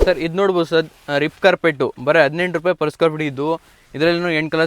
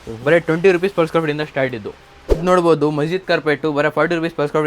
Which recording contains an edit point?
second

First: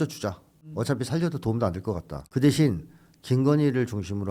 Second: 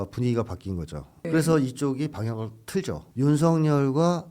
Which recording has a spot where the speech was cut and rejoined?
second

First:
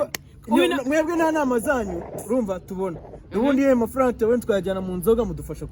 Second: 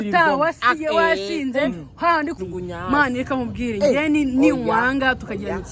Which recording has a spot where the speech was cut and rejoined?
second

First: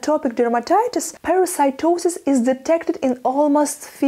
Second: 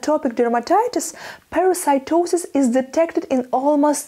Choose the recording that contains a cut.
first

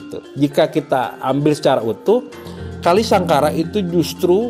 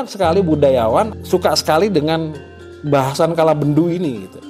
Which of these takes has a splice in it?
second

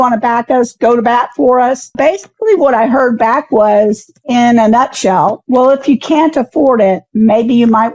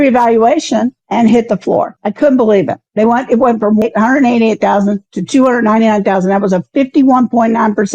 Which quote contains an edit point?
second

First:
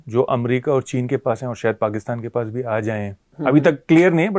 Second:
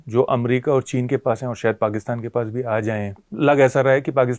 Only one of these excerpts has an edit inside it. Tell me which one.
second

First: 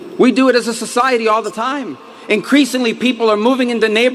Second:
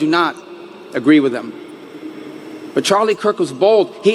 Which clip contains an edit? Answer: first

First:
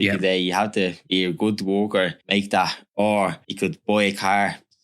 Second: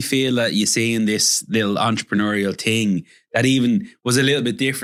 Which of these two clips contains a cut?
first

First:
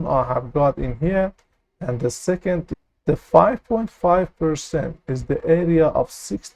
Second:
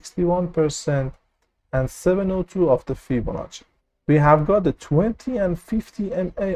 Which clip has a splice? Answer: first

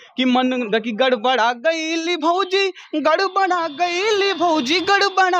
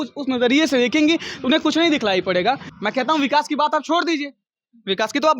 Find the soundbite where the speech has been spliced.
second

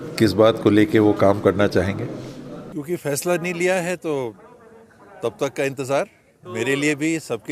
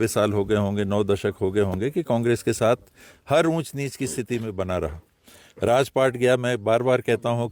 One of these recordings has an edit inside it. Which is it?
first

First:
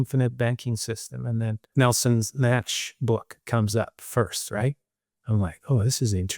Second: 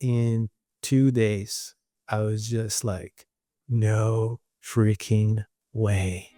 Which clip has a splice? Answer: first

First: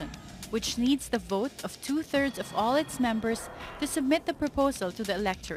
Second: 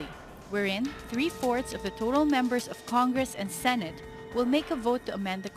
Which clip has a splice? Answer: second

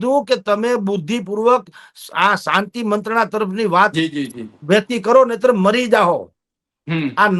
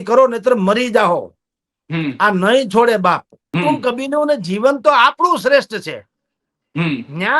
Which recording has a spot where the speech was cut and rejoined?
second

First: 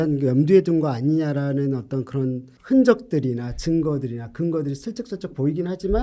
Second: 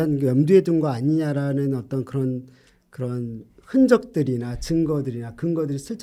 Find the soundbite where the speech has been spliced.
first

